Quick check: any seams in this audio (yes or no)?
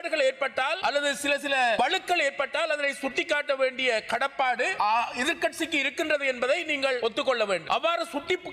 no